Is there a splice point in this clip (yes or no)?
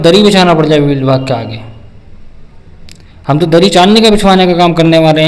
no